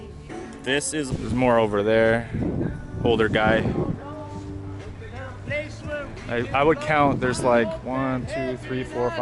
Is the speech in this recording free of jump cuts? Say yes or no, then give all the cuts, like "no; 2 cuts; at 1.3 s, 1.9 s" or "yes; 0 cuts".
no; 1 cut; at 1.1 s